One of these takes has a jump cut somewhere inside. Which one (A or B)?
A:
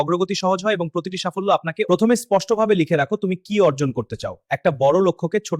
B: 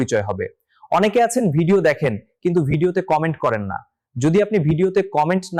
A